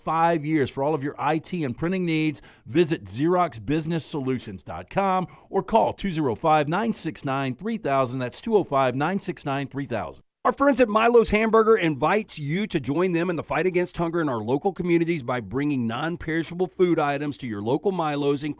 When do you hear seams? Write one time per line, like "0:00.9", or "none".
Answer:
none

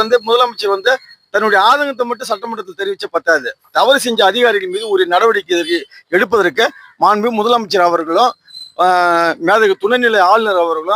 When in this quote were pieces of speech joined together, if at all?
none

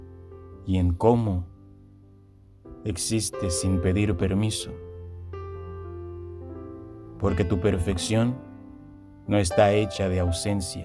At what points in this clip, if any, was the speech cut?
0:05.3
0:07.2

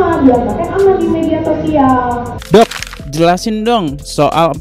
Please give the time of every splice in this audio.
0:02.3

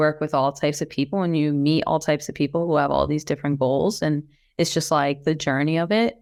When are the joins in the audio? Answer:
none

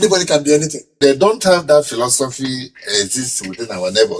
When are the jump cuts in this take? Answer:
0:00.9

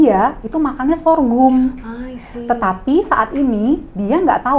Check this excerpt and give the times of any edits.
none

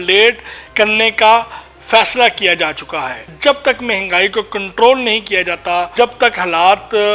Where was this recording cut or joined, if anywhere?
0:03.3
0:05.9

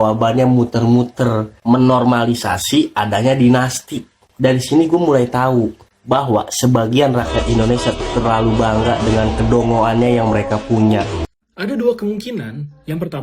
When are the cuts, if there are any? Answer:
0:11.2

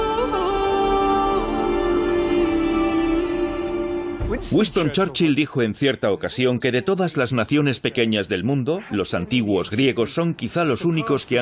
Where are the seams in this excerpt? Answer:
none

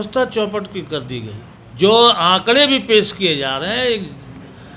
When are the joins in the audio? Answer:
0:01.7

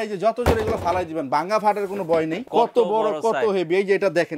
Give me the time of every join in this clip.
0:02.4

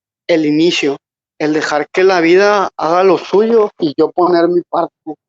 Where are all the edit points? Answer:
0:01.1
0:03.8

